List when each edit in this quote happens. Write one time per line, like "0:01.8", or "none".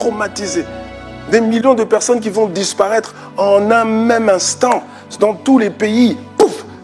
none